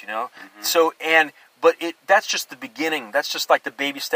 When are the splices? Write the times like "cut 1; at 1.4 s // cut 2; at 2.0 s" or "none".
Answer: none